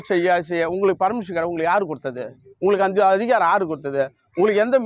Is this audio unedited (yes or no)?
yes